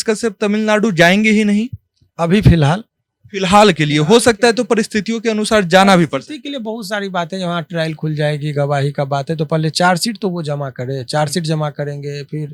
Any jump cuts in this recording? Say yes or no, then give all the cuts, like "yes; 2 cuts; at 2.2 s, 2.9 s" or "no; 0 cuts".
no; 0 cuts